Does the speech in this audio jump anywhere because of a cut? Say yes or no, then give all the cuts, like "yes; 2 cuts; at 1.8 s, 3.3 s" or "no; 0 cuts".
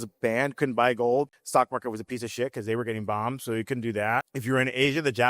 yes; 2 cuts; at 1.4 s, 4.3 s